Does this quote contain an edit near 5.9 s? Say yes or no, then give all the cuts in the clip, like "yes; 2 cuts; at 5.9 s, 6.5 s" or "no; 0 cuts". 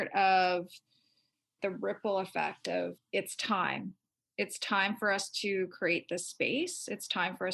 no; 2 cuts; at 1.5 s, 3.0 s